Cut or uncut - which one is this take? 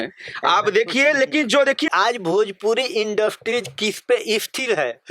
cut